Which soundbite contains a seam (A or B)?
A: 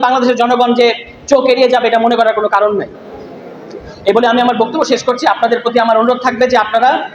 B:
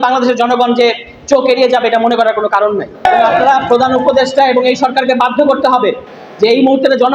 B